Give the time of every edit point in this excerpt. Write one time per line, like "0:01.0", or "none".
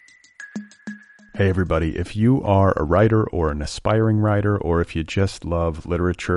0:00.9